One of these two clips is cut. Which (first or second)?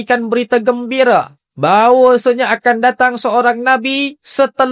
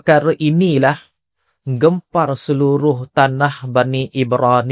first